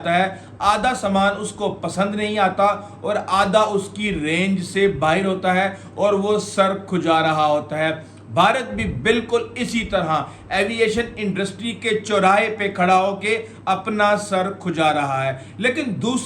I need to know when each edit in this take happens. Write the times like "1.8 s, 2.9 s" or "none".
none